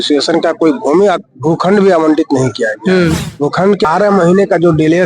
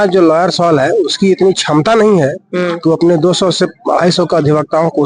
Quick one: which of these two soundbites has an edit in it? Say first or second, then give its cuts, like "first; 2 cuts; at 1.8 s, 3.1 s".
first; 1 cut; at 3.9 s